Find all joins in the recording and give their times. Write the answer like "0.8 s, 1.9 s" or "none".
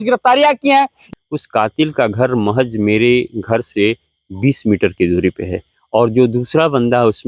1.0 s